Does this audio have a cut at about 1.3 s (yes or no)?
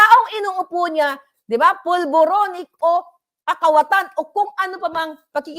yes